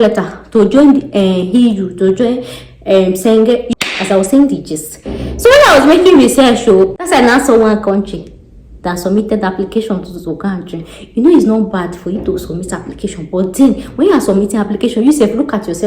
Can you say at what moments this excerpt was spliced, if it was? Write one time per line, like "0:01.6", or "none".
0:03.7
0:06.9